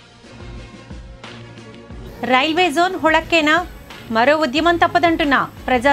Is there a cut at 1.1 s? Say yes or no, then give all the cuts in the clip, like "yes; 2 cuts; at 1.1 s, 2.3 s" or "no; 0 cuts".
yes; 1 cut; at 1.1 s